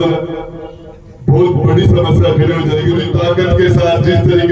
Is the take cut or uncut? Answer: cut